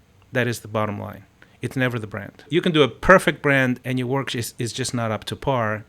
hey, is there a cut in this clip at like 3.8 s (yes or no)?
yes